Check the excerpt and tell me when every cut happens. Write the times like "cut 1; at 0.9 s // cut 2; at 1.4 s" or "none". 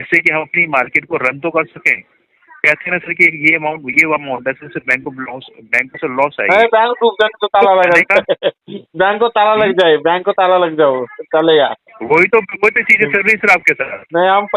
none